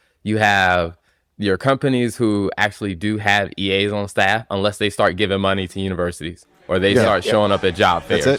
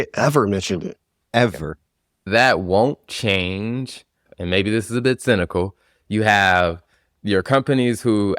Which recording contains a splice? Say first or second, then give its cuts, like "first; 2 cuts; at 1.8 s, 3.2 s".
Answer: second; 2 cuts; at 2.2 s, 4.2 s